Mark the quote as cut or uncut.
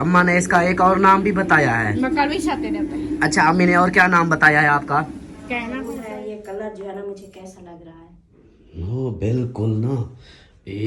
cut